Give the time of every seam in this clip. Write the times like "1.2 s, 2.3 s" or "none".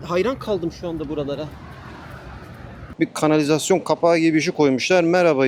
2.9 s